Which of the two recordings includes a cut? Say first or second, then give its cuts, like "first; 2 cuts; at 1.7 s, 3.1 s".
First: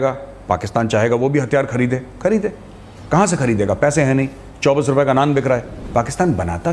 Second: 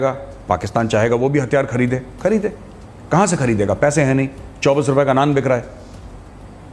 first; 1 cut; at 5.8 s